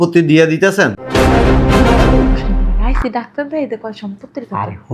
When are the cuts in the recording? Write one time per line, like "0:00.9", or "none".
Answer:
0:00.9